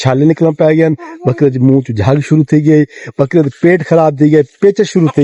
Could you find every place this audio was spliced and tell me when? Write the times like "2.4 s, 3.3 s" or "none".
none